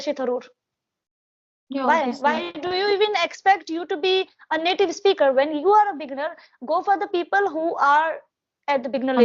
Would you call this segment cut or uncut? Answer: uncut